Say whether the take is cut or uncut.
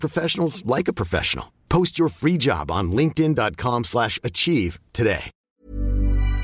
cut